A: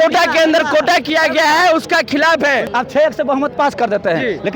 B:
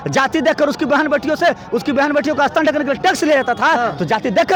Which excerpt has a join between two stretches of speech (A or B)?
A